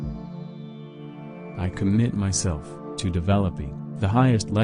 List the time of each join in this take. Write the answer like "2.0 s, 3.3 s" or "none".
1.0 s